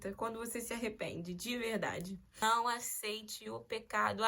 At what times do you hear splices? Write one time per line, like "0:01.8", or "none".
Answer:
0:02.4